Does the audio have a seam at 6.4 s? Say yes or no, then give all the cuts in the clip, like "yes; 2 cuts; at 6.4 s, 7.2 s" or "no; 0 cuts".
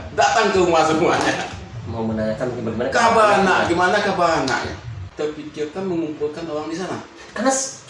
no; 1 cut; at 5.0 s